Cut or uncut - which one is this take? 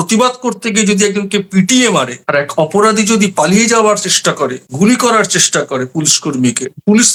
uncut